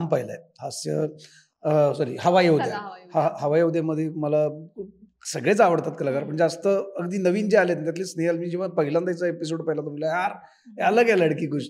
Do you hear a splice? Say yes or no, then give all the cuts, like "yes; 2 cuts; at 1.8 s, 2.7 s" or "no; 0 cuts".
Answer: no; 0 cuts